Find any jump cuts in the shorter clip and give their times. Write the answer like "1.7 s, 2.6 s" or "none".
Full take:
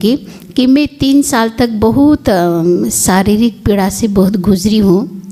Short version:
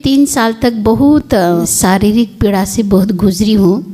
1.4 s